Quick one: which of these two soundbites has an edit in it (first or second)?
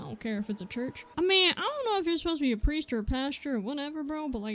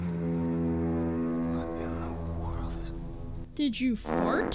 first